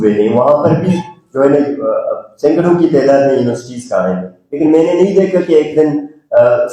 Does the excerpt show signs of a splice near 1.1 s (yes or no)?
no